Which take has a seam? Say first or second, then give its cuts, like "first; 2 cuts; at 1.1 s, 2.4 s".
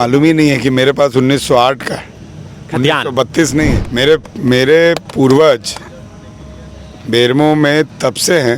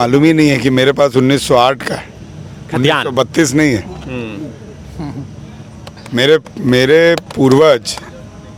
first; 1 cut; at 3.8 s